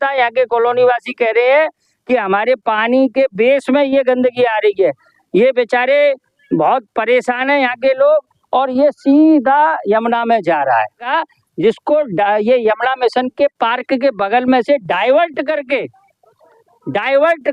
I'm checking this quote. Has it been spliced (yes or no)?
yes